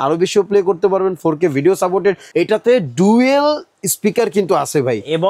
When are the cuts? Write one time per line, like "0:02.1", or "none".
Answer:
0:02.2